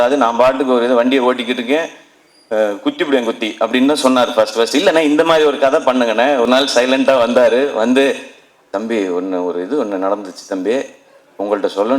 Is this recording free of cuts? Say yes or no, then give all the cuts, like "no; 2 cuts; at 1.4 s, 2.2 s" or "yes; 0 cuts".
no; 1 cut; at 6.5 s